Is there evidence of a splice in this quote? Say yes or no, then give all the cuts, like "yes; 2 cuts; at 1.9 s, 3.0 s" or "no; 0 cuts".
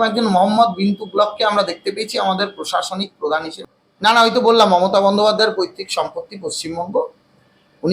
yes; 1 cut; at 3.5 s